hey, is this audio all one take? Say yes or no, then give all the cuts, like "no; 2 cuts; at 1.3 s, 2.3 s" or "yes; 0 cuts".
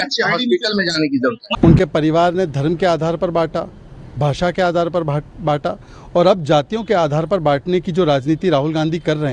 no; 1 cut; at 1.5 s